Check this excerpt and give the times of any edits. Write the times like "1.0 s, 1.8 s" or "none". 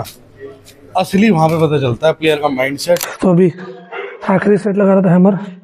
3.1 s